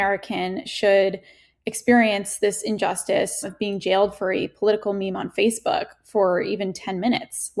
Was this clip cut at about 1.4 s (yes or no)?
no